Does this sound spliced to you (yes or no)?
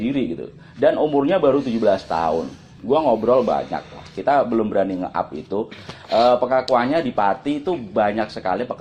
no